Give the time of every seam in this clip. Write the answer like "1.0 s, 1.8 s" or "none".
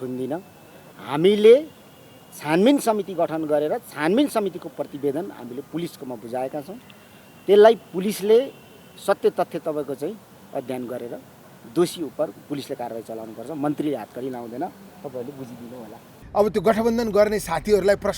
16.1 s